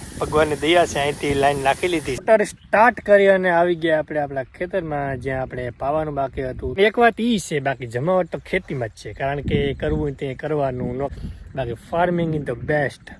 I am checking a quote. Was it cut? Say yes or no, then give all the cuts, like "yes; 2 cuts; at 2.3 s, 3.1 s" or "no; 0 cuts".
yes; 3 cuts; at 2.1 s, 6.7 s, 11.2 s